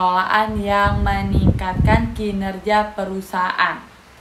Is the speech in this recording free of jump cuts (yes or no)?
yes